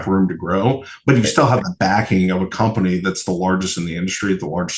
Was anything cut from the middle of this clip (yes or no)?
no